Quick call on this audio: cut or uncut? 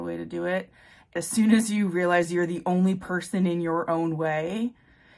cut